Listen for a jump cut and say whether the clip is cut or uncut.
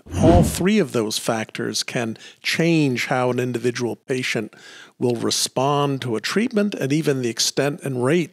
uncut